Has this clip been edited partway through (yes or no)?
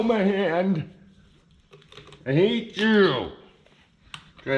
no